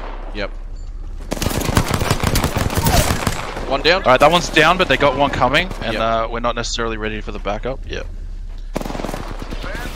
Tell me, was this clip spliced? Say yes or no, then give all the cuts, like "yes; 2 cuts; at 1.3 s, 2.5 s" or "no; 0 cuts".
no; 0 cuts